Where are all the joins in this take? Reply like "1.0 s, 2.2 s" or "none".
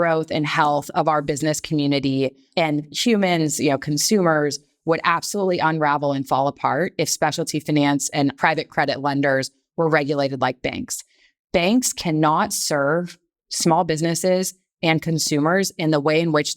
2.5 s, 8.4 s